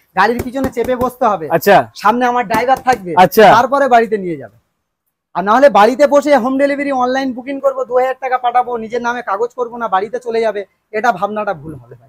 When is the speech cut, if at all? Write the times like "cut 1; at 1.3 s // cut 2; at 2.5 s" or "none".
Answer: none